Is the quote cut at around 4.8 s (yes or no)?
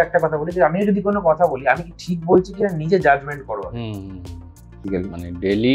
yes